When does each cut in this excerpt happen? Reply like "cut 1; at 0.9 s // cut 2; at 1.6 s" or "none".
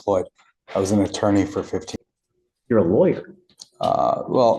cut 1; at 1.9 s